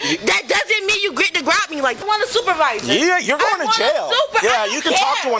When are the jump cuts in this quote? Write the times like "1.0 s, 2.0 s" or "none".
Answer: 2.0 s

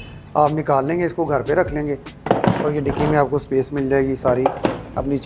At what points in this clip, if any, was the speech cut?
none

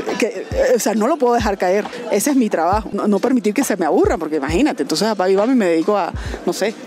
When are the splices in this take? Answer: 1.9 s, 3.0 s

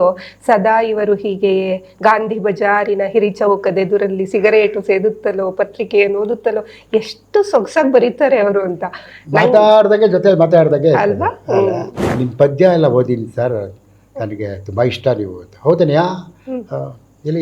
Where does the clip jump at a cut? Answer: 12.1 s

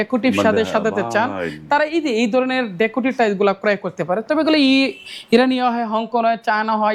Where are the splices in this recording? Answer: none

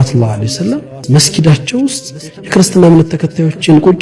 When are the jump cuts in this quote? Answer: 1.0 s

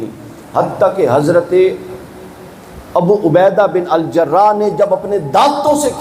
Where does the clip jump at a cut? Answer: none

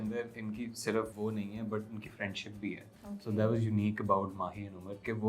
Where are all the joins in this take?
1.1 s

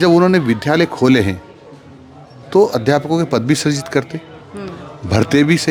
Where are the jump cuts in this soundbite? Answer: none

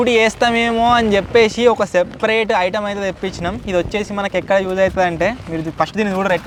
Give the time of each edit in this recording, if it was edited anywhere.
none

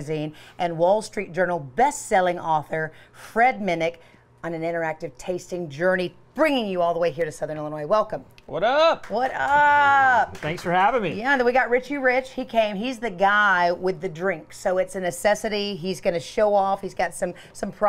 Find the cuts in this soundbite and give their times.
none

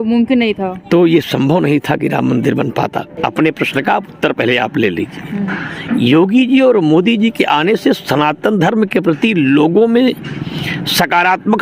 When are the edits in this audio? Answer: 3.1 s

